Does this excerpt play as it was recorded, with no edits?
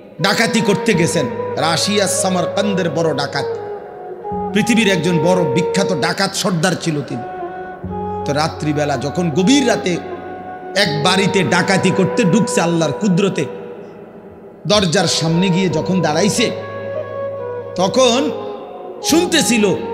yes; 0 cuts

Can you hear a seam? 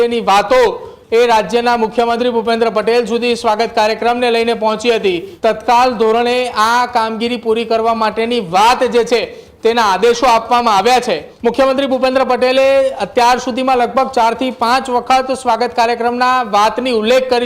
yes; 2 cuts; at 5.3 s, 11.3 s

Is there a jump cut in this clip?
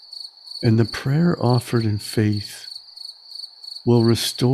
no; 0 cuts

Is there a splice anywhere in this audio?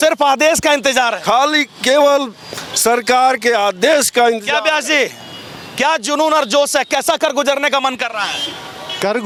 no; 0 cuts

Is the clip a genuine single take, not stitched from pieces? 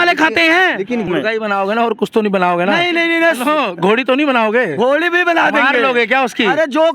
no; 1 cut; at 1.1 s

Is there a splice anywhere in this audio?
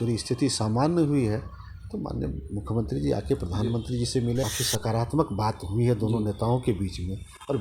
yes; 1 cut; at 4.5 s

